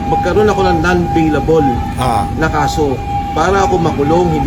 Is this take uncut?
yes; 0 cuts

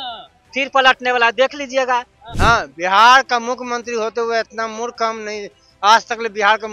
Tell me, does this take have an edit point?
yes; 1 cut; at 2.2 s

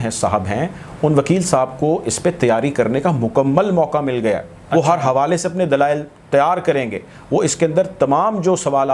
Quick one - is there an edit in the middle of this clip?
no; 0 cuts

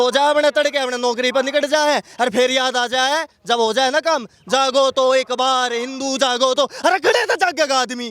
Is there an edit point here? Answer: no; 0 cuts

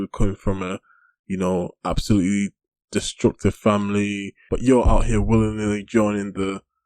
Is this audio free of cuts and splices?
no; 1 cut; at 4.4 s

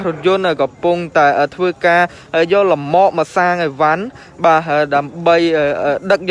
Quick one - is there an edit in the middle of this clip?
no; 0 cuts

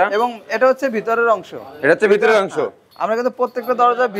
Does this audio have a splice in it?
no; 0 cuts

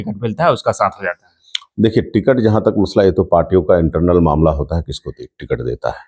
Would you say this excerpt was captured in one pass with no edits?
yes; 0 cuts

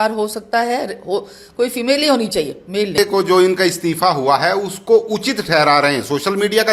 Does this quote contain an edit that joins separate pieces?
yes; 1 cut; at 3.0 s

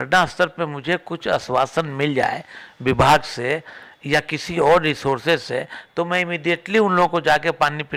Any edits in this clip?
no; 0 cuts

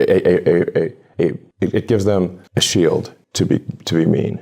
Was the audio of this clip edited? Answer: yes; 2 cuts; at 1.2 s, 3.2 s

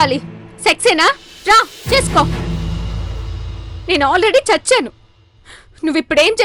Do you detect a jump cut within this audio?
no; 0 cuts

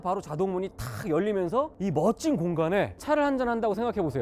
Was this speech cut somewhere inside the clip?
yes; 1 cut; at 2.9 s

